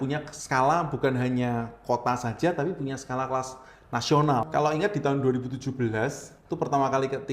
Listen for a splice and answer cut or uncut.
cut